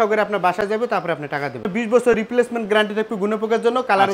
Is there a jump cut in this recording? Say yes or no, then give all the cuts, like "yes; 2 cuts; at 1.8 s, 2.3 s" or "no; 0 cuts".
yes; 1 cut; at 1.7 s